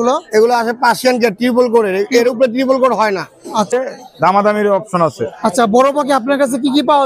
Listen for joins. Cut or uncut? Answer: cut